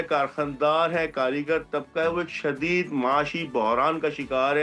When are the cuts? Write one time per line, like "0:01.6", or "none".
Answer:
none